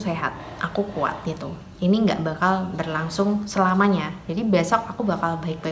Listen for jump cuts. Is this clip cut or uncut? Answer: uncut